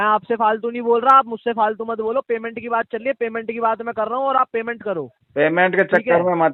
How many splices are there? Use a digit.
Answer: 0